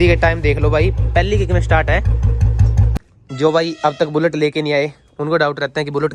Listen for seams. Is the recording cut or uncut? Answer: cut